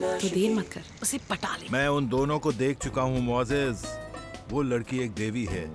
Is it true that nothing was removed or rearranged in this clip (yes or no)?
no